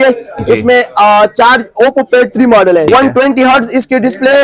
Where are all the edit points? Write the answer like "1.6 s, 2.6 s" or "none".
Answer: 2.9 s